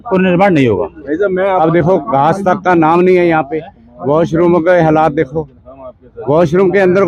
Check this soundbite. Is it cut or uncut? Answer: cut